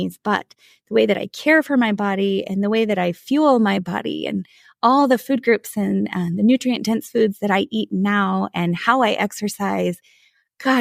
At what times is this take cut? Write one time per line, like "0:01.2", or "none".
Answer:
none